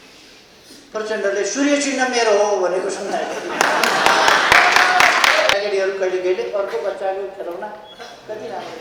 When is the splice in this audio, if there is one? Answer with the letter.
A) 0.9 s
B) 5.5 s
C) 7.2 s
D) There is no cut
B